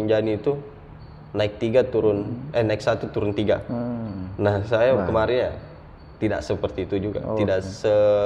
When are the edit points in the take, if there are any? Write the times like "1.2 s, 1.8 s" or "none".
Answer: none